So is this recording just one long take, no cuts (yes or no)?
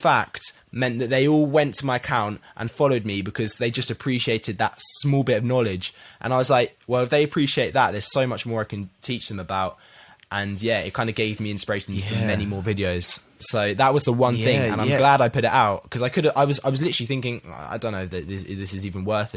yes